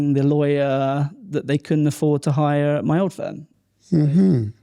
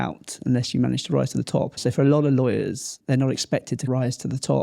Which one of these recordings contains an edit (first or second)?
second